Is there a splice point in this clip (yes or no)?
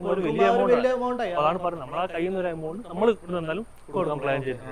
no